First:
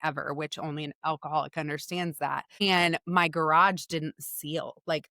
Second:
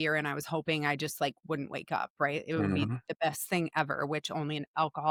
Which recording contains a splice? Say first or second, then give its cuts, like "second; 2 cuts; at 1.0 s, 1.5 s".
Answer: first; 1 cut; at 2.6 s